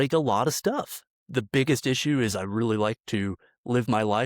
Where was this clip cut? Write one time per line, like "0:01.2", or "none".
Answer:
0:01.2